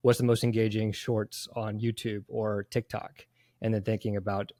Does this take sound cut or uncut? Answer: uncut